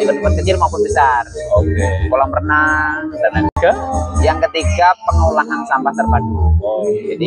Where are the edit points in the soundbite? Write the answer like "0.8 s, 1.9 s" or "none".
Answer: 3.6 s